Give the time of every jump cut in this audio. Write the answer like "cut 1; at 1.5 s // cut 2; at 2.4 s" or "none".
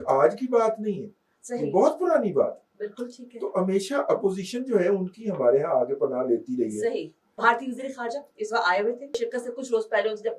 cut 1; at 7.4 s // cut 2; at 9.2 s